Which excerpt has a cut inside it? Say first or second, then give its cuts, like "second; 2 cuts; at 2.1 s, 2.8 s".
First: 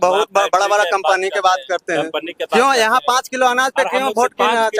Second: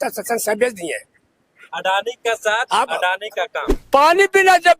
second; 1 cut; at 3.7 s